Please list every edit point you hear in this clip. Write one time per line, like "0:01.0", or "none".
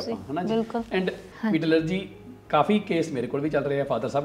0:01.3

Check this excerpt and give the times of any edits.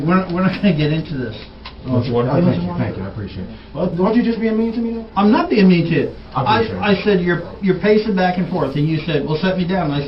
none

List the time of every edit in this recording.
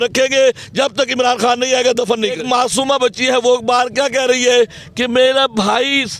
0:02.4

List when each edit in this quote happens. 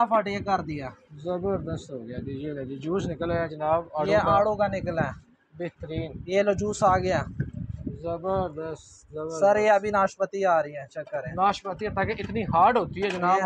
none

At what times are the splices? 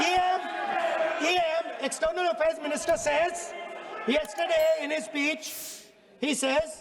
none

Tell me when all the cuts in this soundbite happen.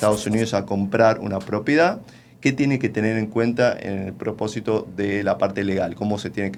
none

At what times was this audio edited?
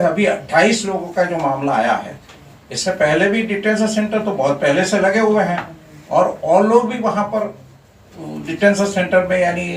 none

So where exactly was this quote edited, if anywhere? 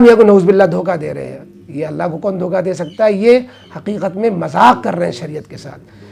none

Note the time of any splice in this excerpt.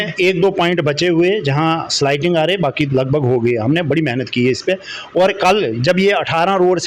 none

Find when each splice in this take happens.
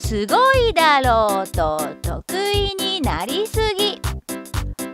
none

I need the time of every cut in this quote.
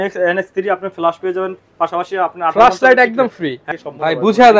0:03.7

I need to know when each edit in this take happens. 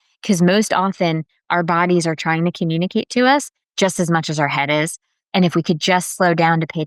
none

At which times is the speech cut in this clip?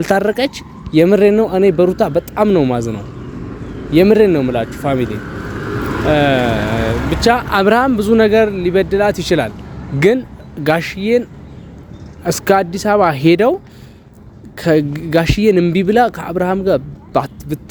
none

